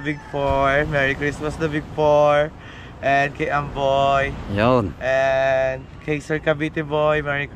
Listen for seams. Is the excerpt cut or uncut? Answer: uncut